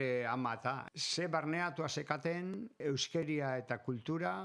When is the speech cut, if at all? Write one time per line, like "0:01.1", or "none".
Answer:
0:00.9
0:02.8

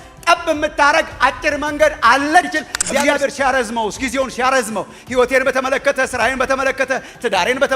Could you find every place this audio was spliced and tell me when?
0:03.0

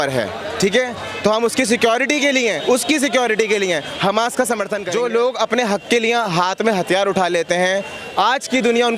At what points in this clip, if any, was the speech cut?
0:04.8

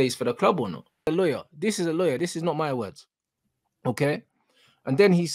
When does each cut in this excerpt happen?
0:01.1

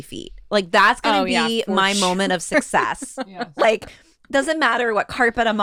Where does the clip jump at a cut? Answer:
none

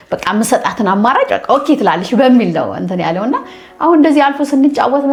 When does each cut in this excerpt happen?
none

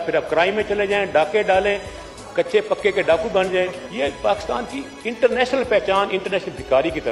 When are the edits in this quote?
0:03.8

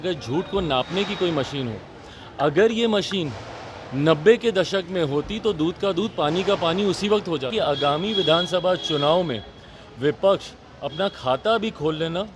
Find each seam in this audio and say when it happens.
0:07.5

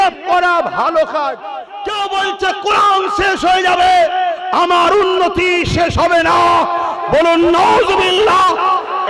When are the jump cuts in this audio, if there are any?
0:01.8

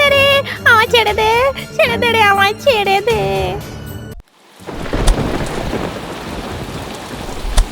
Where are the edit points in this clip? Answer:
0:04.1

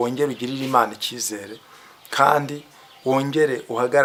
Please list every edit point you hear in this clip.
none

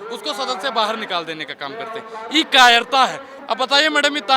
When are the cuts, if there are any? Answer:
0:03.3

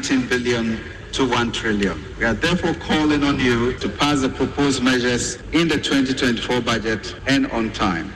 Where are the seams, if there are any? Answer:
0:02.1
0:03.8
0:05.3
0:07.1

